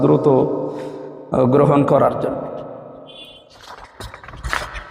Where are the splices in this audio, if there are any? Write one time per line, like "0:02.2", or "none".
none